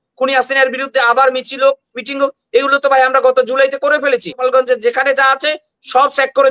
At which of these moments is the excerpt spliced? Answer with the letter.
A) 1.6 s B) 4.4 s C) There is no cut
B